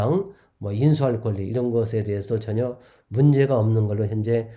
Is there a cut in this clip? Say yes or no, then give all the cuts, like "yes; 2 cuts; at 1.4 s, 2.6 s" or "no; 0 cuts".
no; 0 cuts